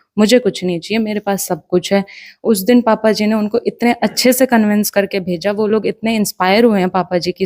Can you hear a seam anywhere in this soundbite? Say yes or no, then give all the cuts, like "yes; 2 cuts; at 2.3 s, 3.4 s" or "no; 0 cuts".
no; 0 cuts